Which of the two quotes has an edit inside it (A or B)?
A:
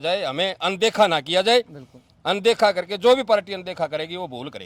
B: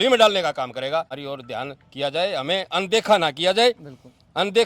B